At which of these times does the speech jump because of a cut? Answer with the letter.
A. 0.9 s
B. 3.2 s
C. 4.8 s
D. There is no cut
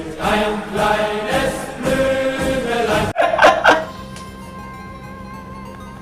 B